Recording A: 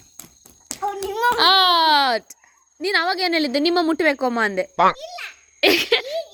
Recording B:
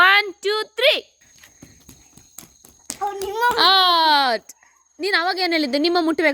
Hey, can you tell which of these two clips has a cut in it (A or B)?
B